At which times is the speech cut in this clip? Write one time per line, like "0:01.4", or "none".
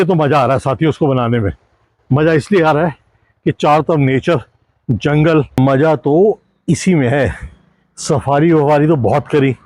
0:05.6